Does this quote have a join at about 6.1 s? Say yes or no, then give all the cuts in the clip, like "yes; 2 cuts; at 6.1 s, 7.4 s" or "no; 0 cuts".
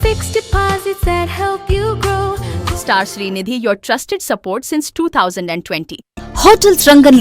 yes; 2 cuts; at 2.5 s, 6.1 s